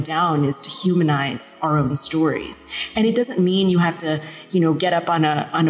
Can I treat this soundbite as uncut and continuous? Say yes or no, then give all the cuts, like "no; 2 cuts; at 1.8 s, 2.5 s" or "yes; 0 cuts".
yes; 0 cuts